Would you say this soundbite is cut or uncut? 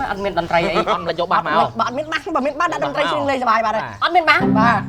uncut